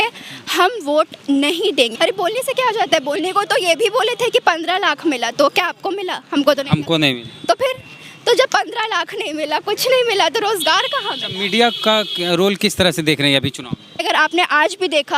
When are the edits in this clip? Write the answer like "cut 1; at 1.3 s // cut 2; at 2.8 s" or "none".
cut 1; at 1.9 s // cut 2; at 14.0 s